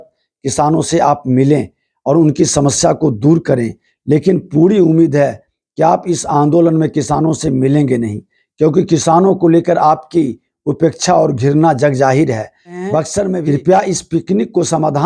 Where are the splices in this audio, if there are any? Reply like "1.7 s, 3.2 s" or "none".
13.3 s